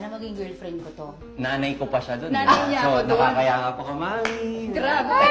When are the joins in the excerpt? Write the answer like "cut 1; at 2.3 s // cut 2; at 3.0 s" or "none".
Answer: cut 1; at 1.1 s